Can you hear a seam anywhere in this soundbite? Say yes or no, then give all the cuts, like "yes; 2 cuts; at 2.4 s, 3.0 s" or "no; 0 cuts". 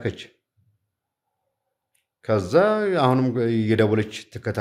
no; 0 cuts